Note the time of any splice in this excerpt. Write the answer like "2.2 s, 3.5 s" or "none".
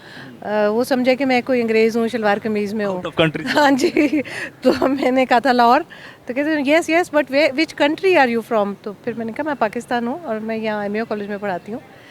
none

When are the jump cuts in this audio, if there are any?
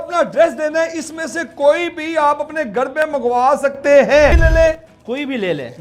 4.4 s

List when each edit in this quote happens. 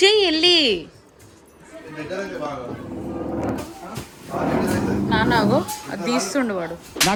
none

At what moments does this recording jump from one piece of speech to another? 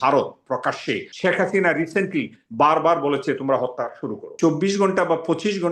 1.1 s, 4.3 s

